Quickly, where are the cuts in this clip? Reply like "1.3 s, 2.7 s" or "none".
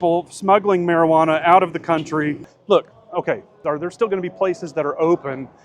2.6 s, 3.5 s